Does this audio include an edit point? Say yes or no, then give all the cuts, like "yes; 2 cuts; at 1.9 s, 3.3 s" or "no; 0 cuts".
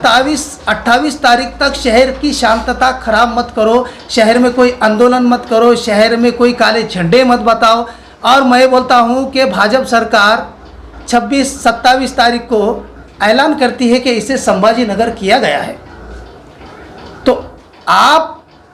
no; 0 cuts